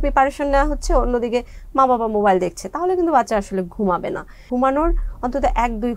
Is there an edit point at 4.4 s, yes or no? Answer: yes